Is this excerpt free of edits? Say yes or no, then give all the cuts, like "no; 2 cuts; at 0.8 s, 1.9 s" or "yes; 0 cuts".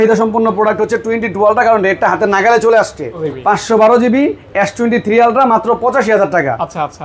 no; 1 cut; at 3.2 s